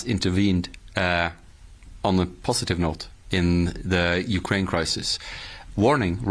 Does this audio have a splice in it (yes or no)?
no